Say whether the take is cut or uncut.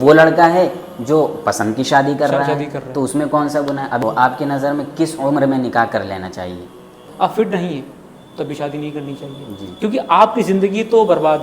cut